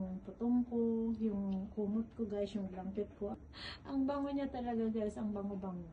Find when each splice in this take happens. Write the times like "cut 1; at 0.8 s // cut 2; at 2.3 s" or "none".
cut 1; at 3.3 s